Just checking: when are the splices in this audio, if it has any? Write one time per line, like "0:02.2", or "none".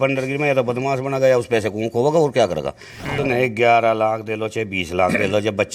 0:03.1